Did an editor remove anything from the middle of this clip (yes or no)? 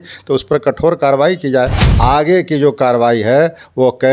yes